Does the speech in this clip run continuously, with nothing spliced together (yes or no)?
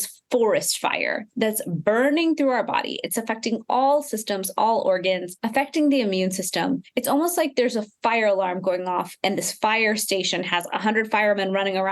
no